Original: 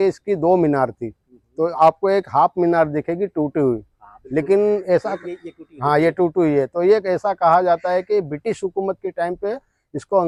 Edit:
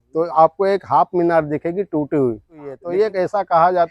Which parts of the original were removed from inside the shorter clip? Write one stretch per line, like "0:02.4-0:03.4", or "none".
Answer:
0:04.2-0:06.7